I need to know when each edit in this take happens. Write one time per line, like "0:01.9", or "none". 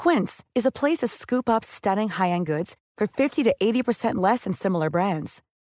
none